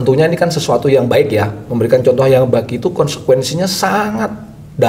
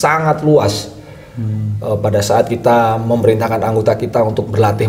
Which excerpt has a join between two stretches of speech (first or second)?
first